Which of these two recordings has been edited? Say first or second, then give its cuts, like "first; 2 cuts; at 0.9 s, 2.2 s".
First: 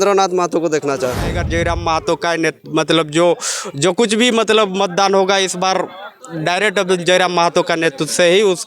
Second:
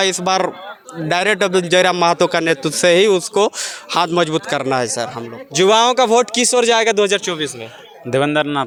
first; 1 cut; at 1.3 s